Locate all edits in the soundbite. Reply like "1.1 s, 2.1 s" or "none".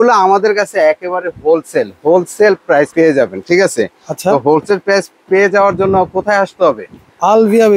none